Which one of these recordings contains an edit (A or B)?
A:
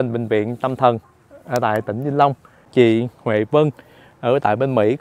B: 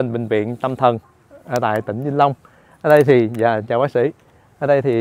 A